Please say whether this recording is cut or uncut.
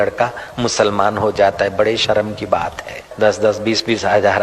cut